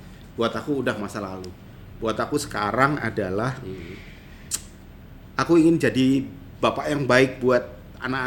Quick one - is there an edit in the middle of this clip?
no; 0 cuts

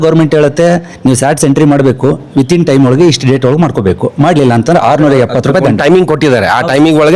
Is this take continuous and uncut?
yes; 0 cuts

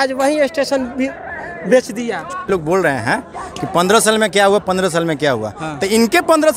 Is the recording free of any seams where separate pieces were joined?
no; 1 cut; at 2.5 s

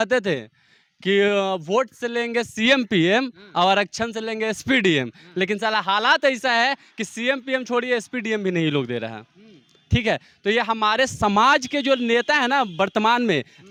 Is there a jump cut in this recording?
no; 0 cuts

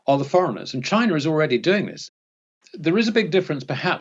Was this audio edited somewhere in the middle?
yes; 1 cut; at 2.3 s

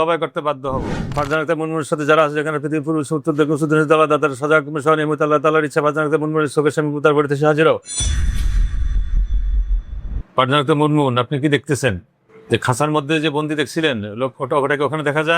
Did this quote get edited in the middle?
yes; 1 cut; at 1.1 s

